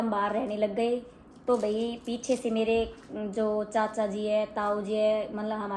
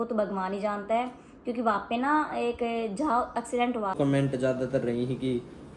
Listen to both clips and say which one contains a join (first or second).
second